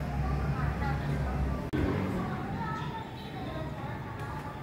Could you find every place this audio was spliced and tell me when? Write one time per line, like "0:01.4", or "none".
0:01.7